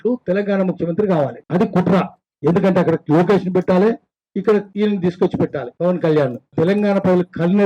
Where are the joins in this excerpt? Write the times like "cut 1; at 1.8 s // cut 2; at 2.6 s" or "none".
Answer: cut 1; at 1.4 s // cut 2; at 2.2 s // cut 3; at 4.7 s // cut 4; at 5.7 s // cut 5; at 6.5 s

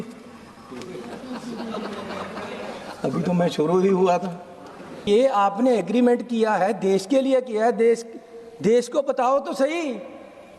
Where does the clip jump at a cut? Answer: cut 1; at 5.1 s

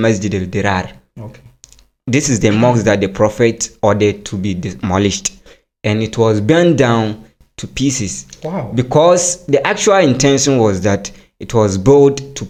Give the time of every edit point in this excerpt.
none

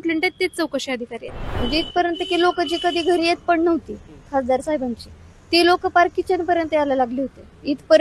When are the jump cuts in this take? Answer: cut 1; at 1.4 s

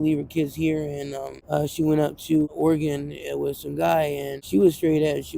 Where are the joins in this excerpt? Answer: cut 1; at 1.3 s // cut 2; at 2.5 s // cut 3; at 4.3 s

